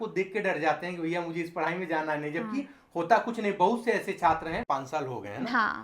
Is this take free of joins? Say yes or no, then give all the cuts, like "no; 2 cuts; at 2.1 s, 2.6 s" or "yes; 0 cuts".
no; 1 cut; at 4.6 s